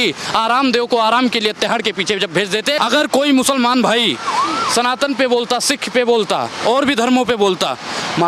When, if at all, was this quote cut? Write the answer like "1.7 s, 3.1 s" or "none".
2.8 s